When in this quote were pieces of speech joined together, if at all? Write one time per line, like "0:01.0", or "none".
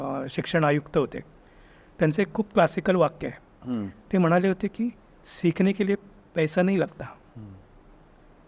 none